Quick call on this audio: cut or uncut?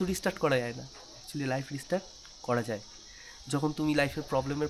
uncut